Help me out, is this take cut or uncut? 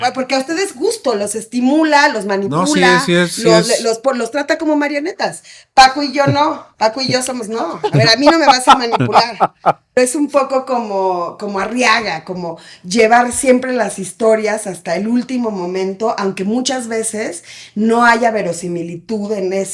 cut